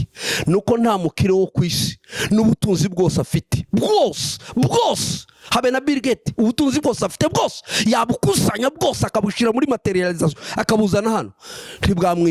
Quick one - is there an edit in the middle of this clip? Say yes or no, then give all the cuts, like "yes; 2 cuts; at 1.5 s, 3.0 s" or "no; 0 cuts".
no; 0 cuts